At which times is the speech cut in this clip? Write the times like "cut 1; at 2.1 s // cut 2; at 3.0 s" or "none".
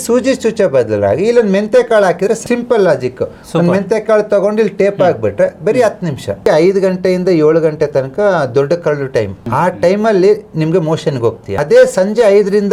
cut 1; at 2.4 s // cut 2; at 6.4 s // cut 3; at 9.4 s // cut 4; at 11.5 s